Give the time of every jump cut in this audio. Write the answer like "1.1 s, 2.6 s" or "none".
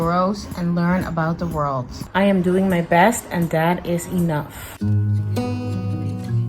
2.0 s, 4.7 s

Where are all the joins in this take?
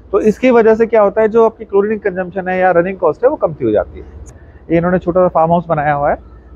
4.3 s

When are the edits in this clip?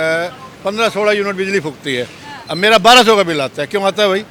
none

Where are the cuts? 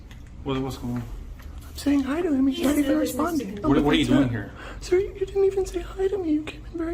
3.6 s, 5.7 s

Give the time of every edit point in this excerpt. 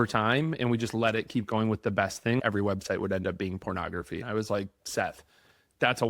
2.4 s, 4.2 s

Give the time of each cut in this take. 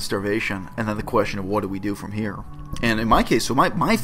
none

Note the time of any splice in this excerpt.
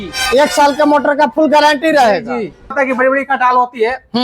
2.6 s

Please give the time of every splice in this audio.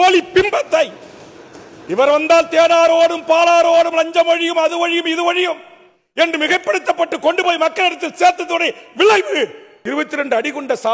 9.8 s

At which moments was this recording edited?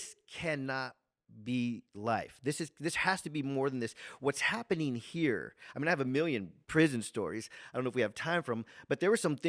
none

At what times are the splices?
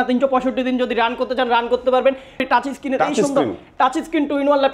2.4 s

